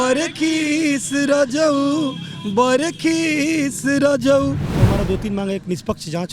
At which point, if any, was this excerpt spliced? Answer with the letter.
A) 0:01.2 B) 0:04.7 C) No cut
B